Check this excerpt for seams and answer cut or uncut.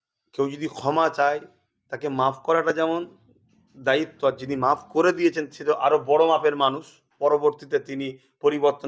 cut